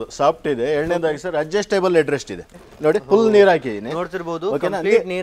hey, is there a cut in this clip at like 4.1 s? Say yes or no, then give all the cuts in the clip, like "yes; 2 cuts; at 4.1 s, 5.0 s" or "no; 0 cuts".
no; 1 cut; at 2.6 s